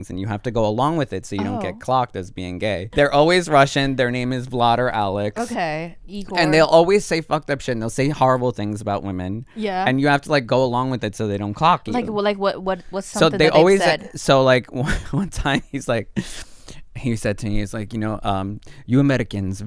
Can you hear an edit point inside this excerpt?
yes; 1 cut; at 2.8 s

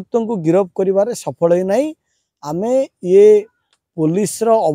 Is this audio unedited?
yes; 0 cuts

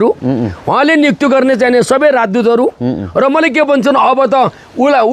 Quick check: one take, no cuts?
yes; 0 cuts

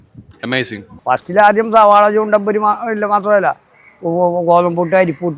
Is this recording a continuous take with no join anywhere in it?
no; 1 cut; at 0.9 s

